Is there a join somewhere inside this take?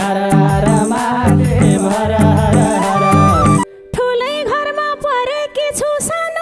yes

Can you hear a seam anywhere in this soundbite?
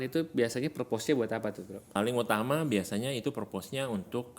yes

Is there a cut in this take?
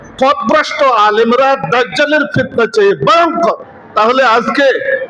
no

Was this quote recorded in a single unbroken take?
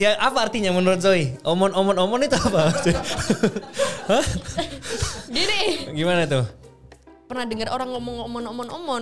no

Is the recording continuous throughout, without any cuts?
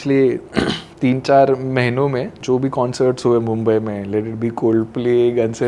yes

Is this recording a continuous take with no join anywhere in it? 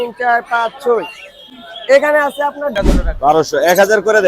no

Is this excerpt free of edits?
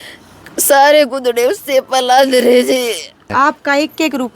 no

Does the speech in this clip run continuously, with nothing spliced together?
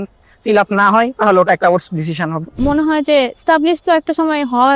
no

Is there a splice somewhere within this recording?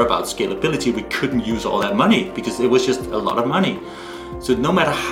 no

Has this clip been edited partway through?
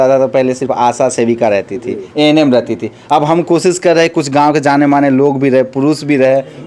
no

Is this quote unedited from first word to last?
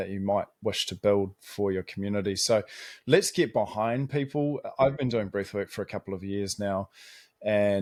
yes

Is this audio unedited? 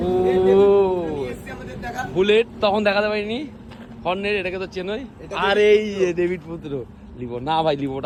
yes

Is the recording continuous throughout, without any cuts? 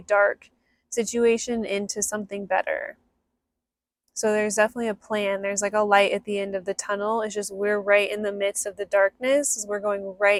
yes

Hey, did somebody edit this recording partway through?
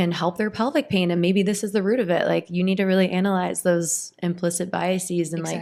no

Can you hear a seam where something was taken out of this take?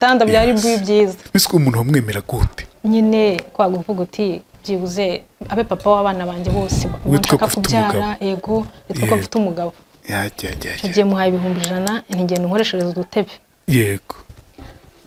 no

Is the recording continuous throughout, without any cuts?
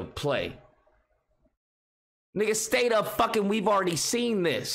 yes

